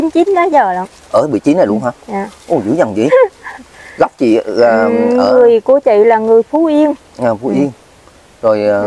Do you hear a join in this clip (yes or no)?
no